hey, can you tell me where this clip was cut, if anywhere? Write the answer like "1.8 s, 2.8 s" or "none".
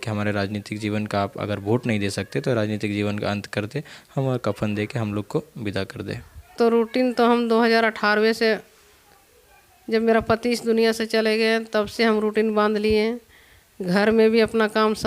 6.5 s

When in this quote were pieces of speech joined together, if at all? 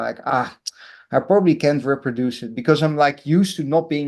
none

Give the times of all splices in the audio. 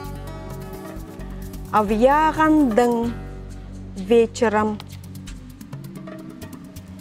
4.8 s

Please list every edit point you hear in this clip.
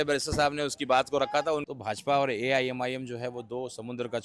1.6 s

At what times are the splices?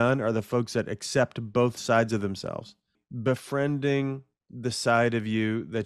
3.0 s

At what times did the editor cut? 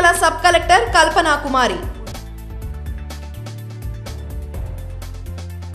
1.9 s

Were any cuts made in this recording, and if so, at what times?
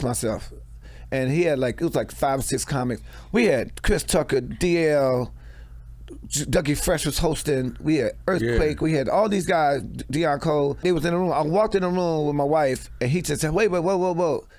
10.8 s

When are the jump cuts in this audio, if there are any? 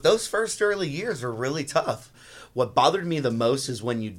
2.1 s

